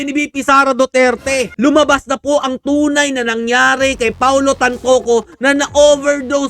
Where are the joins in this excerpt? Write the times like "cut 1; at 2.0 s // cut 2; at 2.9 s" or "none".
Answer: cut 1; at 1.5 s

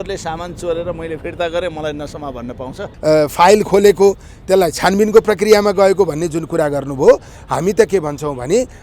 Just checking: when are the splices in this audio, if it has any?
cut 1; at 2.8 s

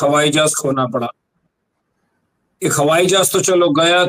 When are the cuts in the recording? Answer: none

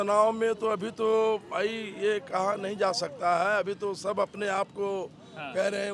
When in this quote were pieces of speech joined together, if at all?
none

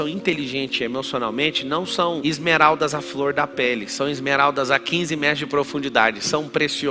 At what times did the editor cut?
none

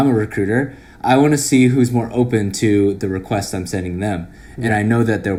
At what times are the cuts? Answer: none

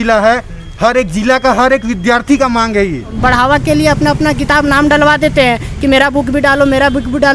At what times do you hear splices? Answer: cut 1; at 3.1 s

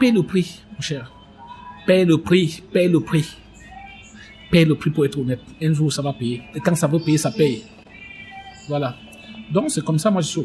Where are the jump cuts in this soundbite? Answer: none

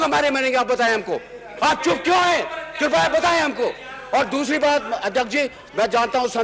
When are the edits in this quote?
none

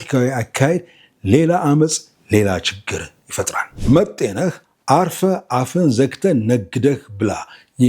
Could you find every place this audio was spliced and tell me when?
cut 1; at 3.7 s

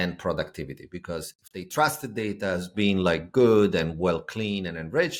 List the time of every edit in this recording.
none

